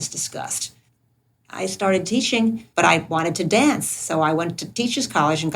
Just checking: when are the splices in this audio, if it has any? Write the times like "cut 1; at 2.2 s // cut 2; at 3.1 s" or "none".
cut 1; at 0.8 s // cut 2; at 2.7 s